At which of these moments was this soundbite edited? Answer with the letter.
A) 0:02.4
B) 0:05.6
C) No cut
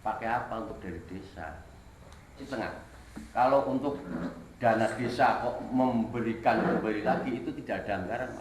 A